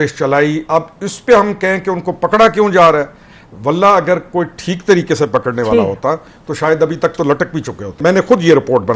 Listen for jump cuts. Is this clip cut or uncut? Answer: cut